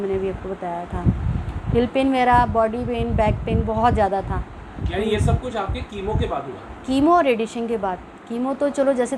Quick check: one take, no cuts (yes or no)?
yes